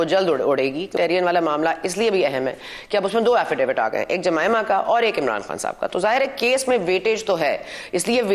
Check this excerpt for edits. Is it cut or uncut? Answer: cut